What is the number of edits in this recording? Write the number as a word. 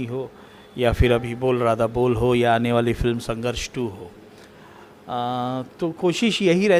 zero